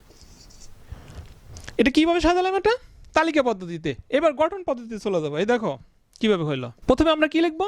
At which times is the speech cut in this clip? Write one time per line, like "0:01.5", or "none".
0:06.7

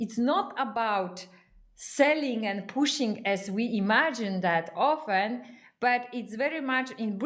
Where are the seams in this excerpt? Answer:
none

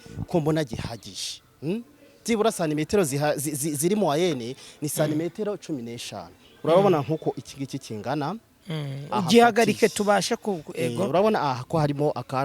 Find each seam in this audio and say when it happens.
none

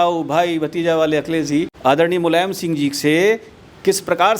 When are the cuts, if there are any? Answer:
0:01.7

